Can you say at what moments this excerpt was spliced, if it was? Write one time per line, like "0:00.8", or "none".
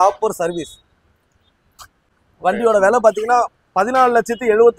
none